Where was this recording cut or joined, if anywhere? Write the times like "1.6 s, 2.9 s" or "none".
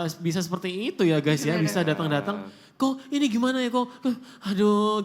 none

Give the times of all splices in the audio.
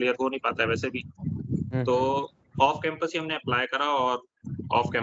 none

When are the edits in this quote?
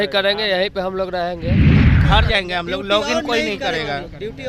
1.4 s, 2.1 s

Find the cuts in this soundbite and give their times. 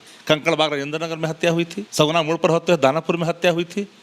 1.8 s

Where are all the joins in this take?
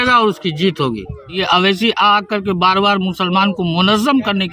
1.4 s

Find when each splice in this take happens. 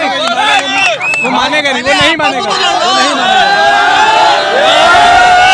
none

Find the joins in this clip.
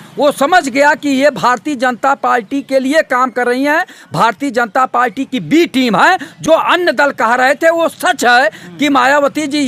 none

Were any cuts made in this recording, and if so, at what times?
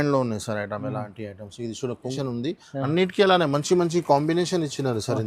2.1 s

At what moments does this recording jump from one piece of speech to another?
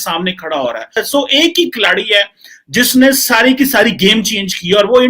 1.0 s

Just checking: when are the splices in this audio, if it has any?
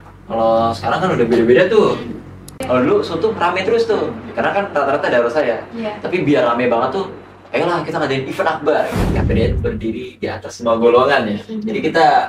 2.5 s, 9.0 s

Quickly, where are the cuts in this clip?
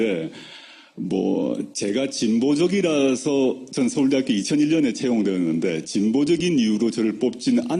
2.1 s

